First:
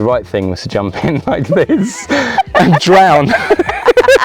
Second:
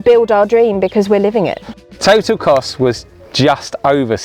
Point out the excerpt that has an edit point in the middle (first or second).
second